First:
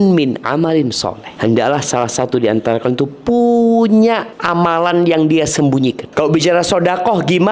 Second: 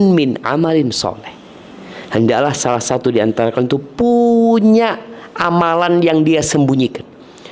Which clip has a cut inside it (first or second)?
first